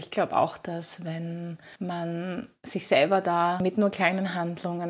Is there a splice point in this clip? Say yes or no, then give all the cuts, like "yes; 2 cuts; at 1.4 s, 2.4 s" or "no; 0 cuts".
yes; 2 cuts; at 1.6 s, 3.6 s